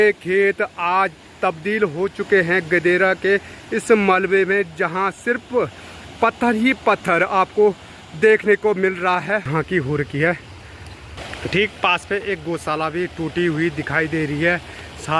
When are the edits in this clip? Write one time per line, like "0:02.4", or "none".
0:09.5